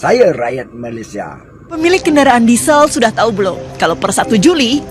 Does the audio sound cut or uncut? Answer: cut